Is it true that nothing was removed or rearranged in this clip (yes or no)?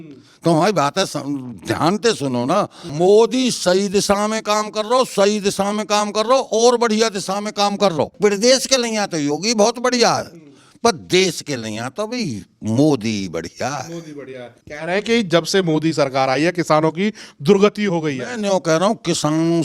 no